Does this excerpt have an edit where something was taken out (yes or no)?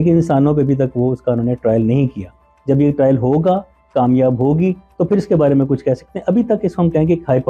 no